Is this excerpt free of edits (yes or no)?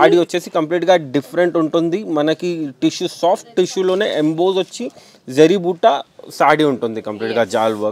yes